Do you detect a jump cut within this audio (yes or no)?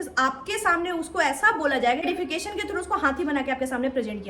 no